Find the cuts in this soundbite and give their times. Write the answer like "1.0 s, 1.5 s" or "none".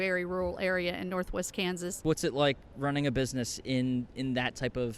2.0 s